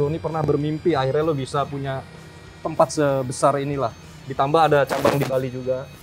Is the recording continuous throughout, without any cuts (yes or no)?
yes